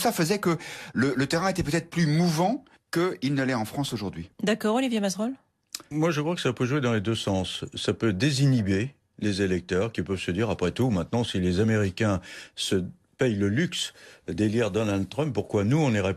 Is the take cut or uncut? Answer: cut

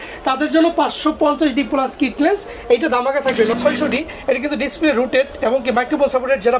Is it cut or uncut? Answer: cut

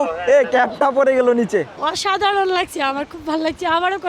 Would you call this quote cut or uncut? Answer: cut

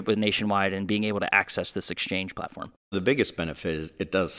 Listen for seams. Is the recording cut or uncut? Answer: cut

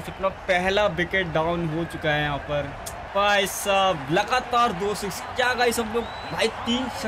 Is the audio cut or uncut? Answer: cut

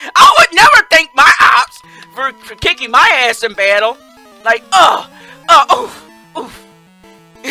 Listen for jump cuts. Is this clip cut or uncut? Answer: uncut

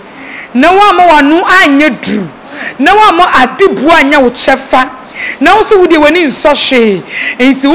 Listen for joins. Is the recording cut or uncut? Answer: uncut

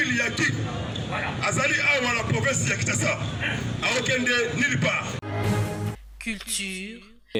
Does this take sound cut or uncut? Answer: uncut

